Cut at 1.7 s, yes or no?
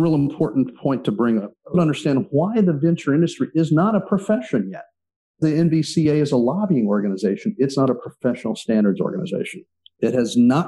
yes